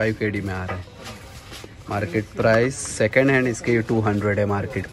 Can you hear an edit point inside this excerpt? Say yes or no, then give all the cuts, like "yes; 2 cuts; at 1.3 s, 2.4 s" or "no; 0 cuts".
no; 0 cuts